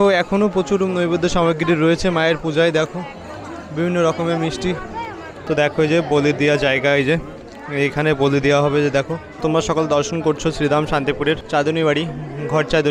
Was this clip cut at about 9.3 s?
yes; 2 cuts; at 5.3 s, 9.3 s

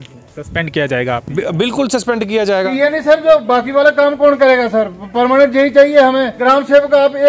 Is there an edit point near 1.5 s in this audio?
no; 2 cuts; at 2.7 s, 6.4 s

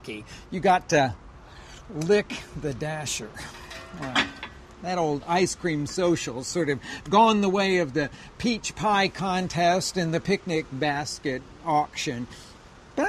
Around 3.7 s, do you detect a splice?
yes; 1 cut; at 3.7 s

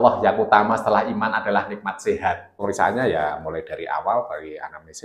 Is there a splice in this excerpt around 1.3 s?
no; 1 cut; at 2.6 s

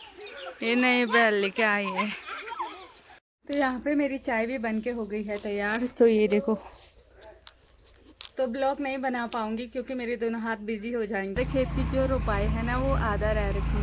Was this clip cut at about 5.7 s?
no; 2 cuts; at 3.5 s, 11.3 s

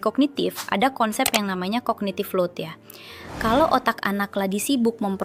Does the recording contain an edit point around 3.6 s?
no; 0 cuts

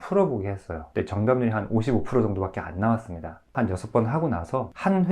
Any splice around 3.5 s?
yes; 1 cut; at 3.5 s

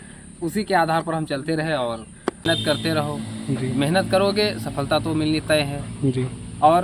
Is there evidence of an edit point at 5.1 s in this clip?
no; 1 cut; at 2.4 s

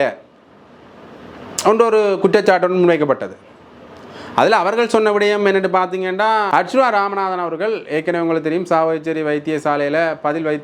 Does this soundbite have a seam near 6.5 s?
yes; 1 cut; at 6.5 s

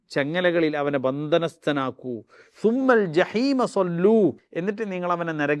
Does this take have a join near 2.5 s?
no; 1 cut; at 4.5 s

